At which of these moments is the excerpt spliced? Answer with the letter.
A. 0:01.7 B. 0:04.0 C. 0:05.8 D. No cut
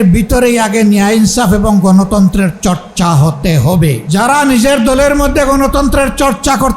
B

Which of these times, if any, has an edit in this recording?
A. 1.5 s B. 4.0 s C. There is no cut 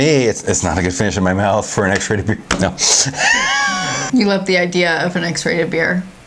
B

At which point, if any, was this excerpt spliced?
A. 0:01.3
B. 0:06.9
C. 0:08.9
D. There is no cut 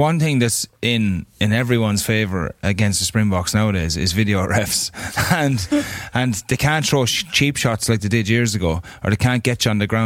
D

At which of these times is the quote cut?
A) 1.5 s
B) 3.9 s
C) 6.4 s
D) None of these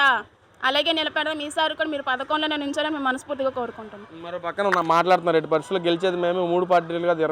D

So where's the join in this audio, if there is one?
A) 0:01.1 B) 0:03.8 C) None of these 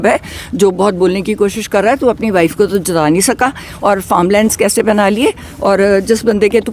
C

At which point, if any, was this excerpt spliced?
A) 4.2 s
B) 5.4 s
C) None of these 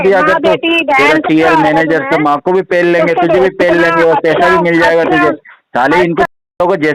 C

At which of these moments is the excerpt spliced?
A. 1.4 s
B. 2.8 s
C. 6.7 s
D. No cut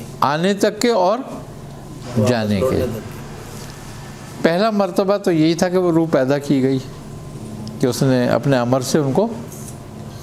D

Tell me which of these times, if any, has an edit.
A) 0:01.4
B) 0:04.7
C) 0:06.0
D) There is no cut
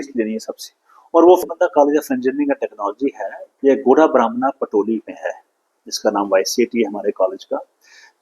A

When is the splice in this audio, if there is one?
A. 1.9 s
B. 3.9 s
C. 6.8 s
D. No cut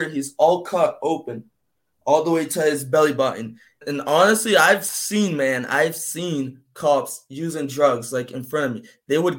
B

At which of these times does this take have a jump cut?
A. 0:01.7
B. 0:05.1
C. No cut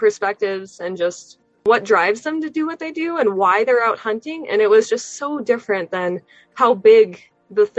A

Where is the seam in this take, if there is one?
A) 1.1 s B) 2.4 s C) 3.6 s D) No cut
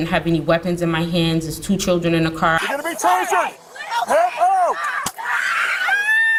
D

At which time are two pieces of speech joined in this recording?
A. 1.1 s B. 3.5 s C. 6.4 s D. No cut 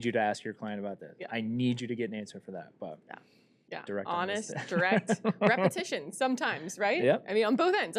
B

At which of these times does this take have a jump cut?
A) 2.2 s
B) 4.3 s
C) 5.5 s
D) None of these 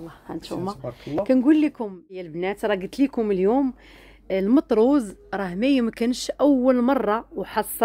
A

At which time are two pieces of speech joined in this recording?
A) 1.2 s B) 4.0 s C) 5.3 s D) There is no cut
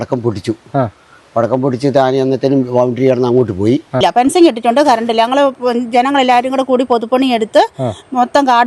B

